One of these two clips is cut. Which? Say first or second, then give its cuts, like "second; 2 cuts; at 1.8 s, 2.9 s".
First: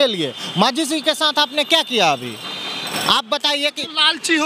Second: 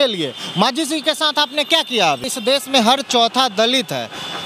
second; 1 cut; at 2.3 s